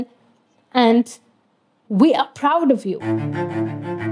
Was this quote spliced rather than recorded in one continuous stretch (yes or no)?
yes